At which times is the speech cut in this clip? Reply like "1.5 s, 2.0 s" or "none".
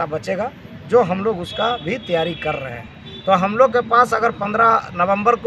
none